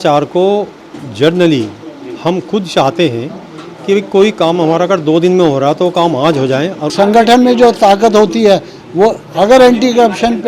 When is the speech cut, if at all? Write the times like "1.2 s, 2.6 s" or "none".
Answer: 6.9 s